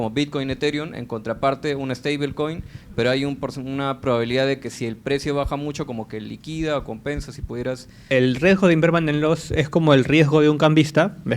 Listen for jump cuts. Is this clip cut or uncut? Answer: cut